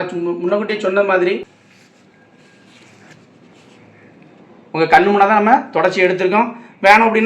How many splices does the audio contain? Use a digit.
1